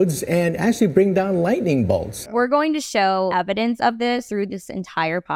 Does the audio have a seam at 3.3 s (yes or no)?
yes